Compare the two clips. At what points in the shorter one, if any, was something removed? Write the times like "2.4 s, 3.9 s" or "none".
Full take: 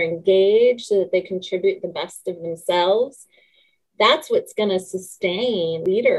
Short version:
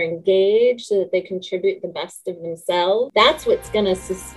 3.1 s